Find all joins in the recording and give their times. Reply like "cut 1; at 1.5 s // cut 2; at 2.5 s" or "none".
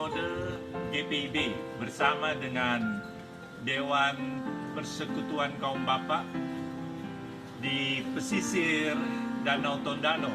none